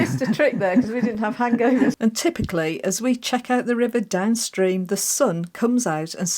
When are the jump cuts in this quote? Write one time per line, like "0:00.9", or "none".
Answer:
0:02.0